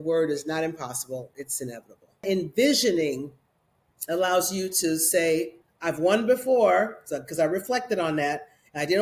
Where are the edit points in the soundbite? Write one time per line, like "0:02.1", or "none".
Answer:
0:02.2